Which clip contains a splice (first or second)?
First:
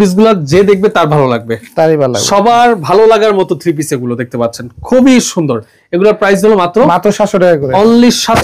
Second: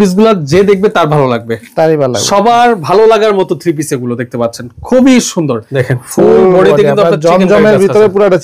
second